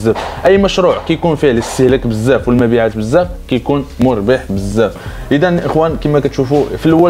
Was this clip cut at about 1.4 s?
no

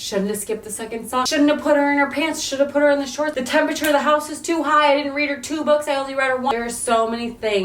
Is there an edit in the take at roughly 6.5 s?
yes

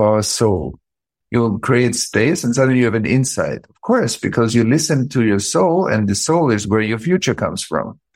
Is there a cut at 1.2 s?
yes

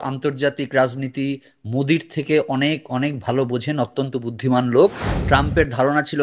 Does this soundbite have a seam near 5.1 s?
yes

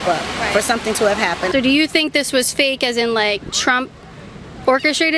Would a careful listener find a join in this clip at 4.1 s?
no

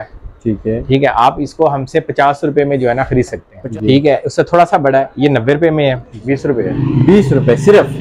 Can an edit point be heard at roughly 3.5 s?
yes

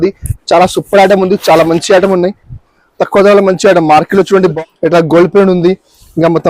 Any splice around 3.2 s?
no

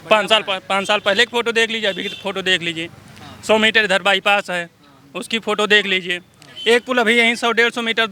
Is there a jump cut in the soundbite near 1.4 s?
no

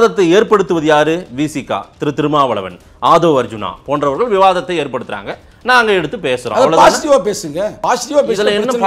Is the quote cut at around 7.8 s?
yes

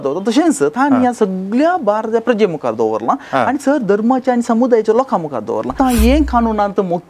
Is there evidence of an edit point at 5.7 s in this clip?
yes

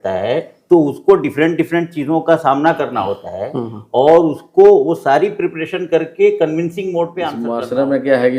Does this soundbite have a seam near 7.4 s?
yes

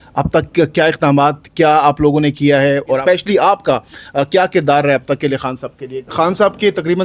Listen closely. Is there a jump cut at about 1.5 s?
no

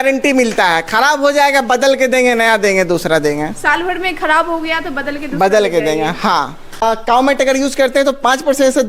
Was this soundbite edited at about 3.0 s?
no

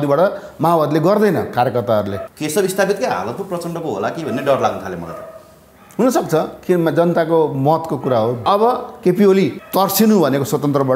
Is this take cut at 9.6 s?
yes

